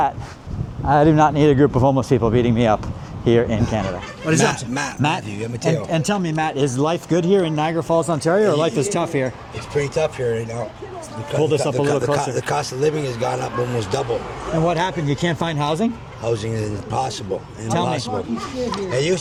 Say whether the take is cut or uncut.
uncut